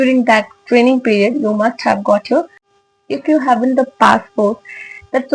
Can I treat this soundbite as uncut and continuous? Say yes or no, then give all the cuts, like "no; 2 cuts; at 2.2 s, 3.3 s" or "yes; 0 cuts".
no; 1 cut; at 2.8 s